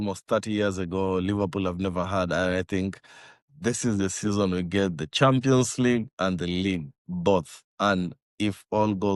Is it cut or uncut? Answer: uncut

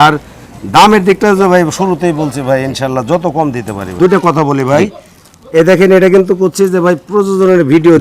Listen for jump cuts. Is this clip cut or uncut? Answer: cut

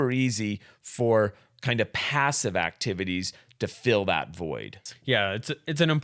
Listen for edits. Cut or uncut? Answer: cut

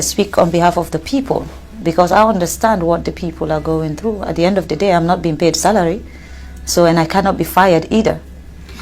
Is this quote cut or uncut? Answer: uncut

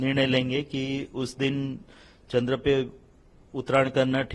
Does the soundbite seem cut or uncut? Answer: uncut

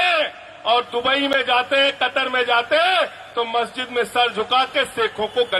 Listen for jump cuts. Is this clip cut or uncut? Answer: uncut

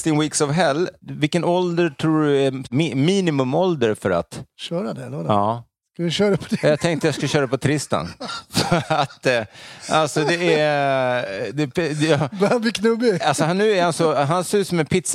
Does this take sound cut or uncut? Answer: uncut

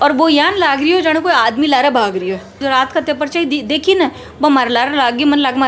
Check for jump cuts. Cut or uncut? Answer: cut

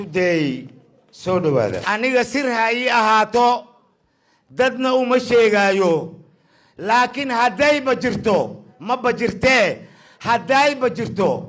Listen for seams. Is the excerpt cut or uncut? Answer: cut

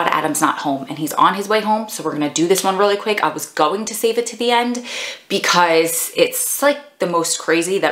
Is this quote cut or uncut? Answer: uncut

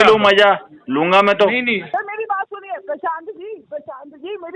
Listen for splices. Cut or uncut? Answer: cut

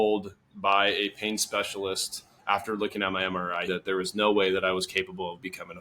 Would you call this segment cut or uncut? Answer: cut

